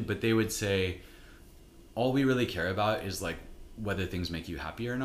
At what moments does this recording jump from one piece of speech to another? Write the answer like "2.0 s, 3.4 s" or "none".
none